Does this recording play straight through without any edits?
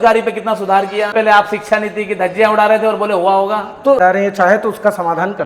no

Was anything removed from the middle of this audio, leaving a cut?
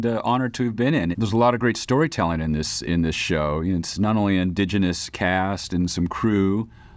yes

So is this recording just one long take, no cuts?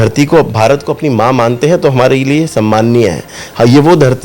yes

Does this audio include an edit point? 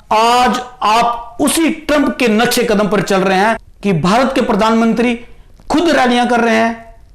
yes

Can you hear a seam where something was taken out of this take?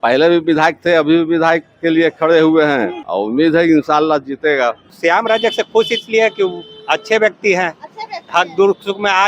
yes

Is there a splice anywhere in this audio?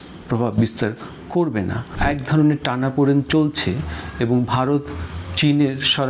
yes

